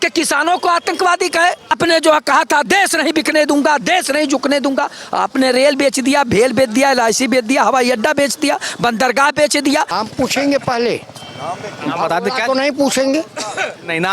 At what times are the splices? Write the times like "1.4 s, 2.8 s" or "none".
1.7 s, 9.9 s